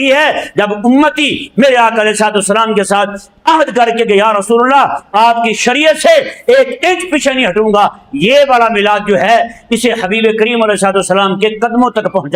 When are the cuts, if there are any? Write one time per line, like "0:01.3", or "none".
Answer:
none